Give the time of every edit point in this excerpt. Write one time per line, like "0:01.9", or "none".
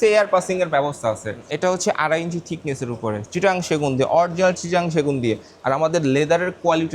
0:01.5

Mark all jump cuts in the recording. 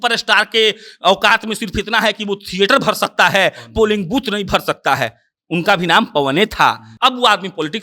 0:06.9

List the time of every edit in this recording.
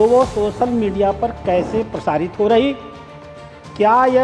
none

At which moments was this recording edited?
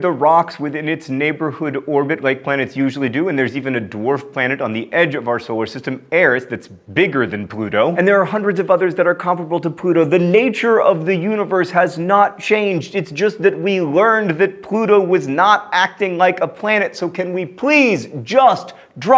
0:08.3

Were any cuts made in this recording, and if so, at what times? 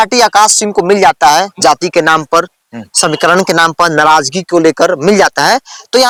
none

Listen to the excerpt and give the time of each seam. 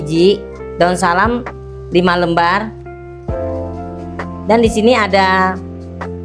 0:02.7
0:04.5

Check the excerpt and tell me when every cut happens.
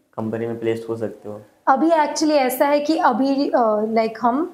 none

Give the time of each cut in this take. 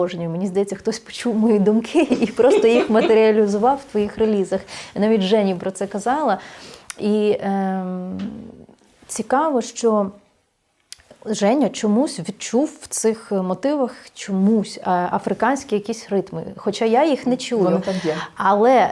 none

